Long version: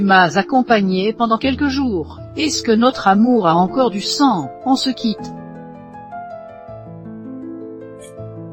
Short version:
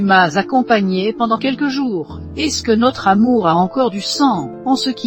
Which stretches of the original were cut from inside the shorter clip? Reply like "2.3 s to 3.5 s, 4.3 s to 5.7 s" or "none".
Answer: none